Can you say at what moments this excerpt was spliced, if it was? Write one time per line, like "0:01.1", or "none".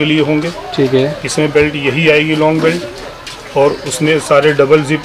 none